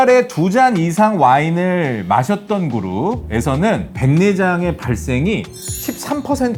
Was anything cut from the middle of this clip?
no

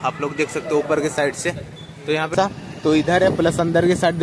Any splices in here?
yes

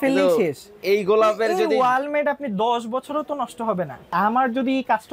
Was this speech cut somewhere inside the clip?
yes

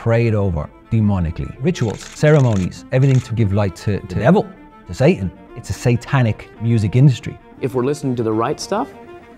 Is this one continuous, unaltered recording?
no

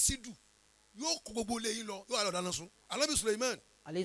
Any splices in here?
yes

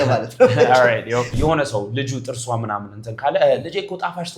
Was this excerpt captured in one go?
no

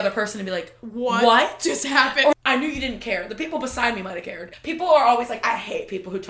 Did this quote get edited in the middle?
yes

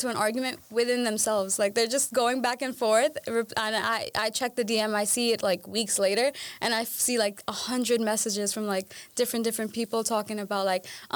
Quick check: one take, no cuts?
yes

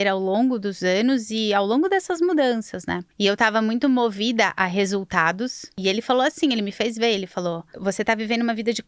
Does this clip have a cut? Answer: yes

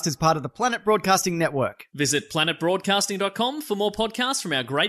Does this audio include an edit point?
no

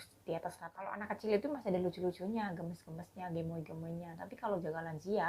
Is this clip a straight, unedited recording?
no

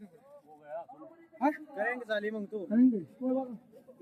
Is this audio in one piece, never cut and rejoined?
yes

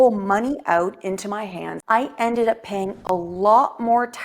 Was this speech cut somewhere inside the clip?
yes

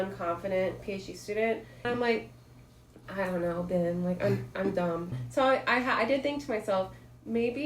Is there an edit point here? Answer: yes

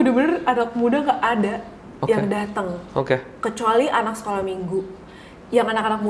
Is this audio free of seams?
yes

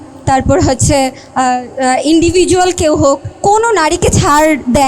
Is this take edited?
yes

